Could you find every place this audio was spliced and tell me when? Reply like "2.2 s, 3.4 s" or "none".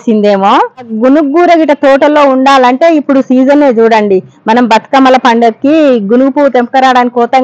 0.9 s